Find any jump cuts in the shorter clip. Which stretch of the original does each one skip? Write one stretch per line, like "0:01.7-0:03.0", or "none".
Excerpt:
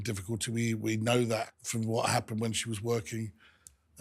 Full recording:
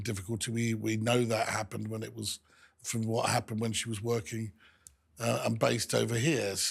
0:01.5-0:02.7

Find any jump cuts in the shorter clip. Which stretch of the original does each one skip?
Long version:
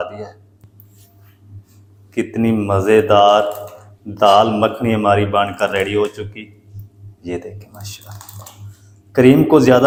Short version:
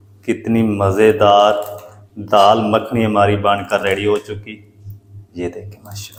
none

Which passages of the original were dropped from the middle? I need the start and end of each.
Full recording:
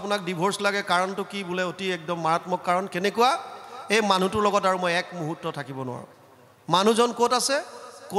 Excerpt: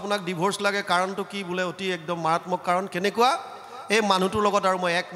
none

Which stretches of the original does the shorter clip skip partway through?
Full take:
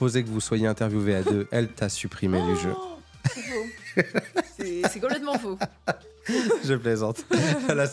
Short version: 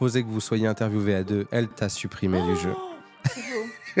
none

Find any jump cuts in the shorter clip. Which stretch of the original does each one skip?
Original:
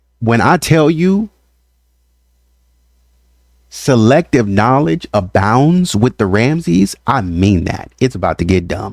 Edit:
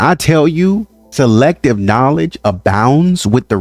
0:01.4-0:03.7

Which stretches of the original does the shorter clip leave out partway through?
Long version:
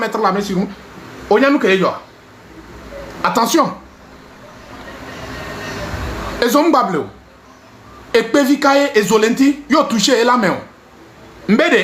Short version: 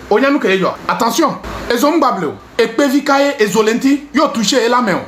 0:02.0-0:03.2
0:03.9-0:06.2
0:07.1-0:08.0

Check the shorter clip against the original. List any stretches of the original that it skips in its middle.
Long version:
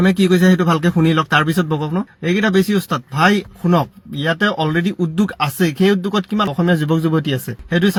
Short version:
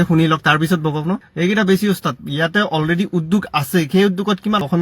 0:03.0-0:04.0

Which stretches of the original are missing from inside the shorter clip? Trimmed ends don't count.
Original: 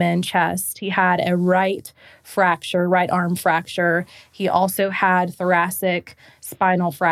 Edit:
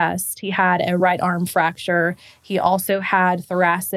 0:01.4-0:02.9

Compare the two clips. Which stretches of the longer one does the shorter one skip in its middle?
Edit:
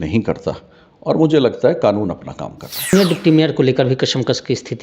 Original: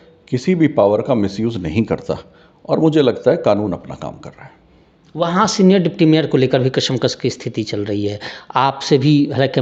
0:04.6-0:05.7

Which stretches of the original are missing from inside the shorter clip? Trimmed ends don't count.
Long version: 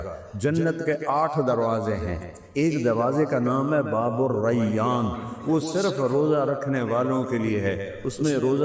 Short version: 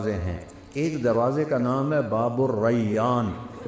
none

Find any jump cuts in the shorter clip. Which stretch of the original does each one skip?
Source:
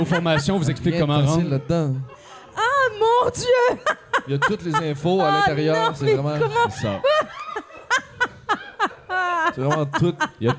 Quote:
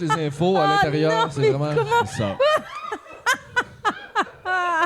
none

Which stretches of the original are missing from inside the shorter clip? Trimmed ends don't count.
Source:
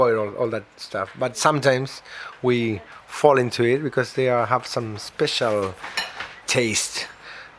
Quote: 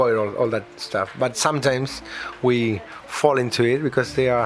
none

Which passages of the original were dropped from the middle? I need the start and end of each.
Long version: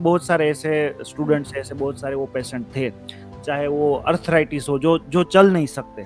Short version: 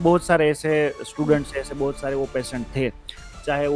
none

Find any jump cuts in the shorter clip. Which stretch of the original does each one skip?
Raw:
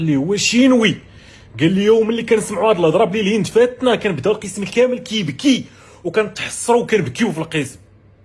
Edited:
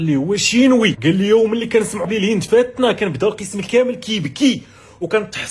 0:01.0-0:01.5
0:02.6-0:03.1

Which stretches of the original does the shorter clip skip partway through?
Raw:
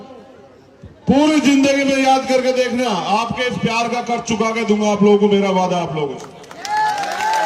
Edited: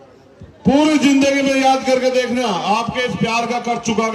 none

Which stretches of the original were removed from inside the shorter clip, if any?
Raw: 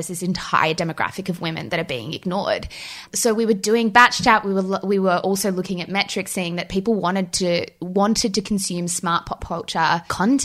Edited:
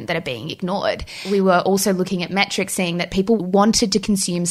0:02.9-0:04.8
0:07.0-0:07.8

